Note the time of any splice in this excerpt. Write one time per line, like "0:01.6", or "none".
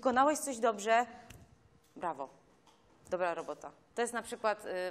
0:03.8